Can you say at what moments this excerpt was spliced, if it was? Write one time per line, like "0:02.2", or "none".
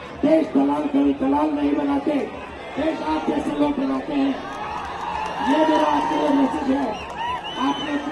none

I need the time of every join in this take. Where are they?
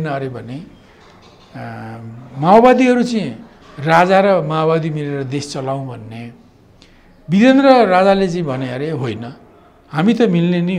none

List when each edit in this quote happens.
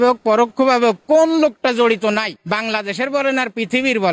0:02.4

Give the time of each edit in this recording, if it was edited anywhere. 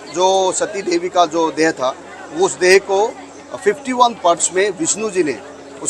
none

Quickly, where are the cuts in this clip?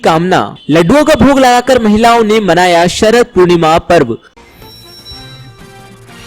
0:04.3

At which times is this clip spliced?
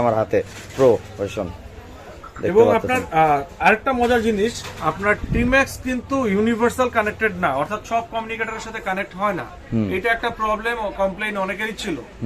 none

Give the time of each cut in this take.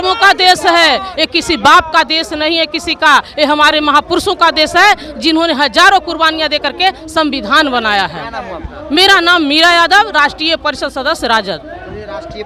none

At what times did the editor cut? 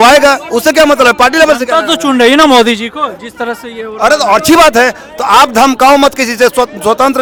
none

